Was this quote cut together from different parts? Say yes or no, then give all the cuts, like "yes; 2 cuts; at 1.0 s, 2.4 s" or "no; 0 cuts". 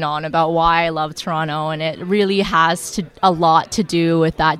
no; 0 cuts